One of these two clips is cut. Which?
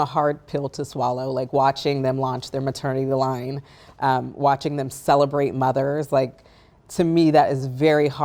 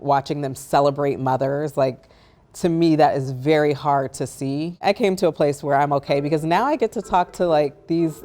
second; 1 cut; at 4.8 s

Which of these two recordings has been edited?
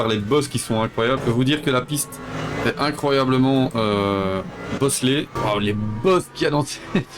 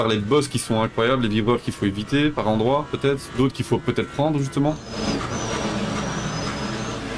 first; 2 cuts; at 1.2 s, 5.3 s

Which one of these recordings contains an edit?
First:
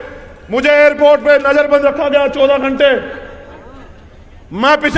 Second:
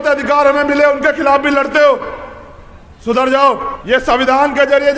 second; 1 cut; at 3.7 s

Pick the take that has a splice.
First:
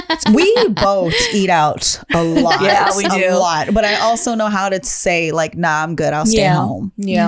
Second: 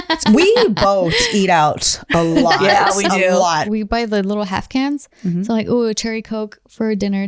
second; 1 cut; at 3.7 s

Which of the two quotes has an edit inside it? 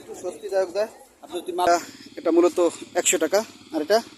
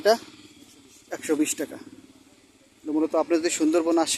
first; 1 cut; at 1.7 s

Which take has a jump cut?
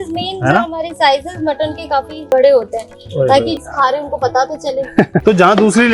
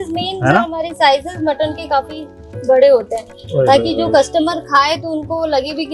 first; 3 cuts; at 2.3 s, 3.6 s, 4.9 s

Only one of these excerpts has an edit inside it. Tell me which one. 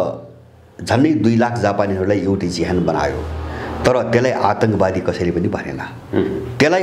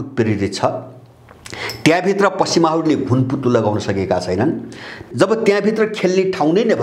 second; 1 cut; at 5.0 s

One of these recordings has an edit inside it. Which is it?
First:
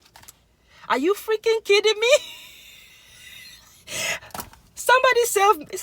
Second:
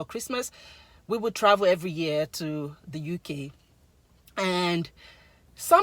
first; 1 cut; at 4.2 s

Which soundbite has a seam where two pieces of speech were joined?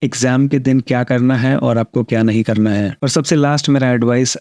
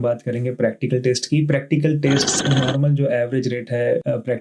second; 1 cut; at 2.4 s

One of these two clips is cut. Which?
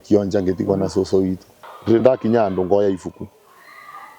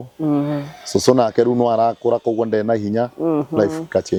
first; 1 cut; at 1.5 s

